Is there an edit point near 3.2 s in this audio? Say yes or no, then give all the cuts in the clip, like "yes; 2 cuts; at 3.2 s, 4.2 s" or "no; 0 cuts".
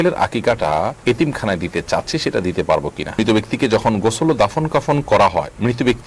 yes; 2 cuts; at 1.0 s, 3.2 s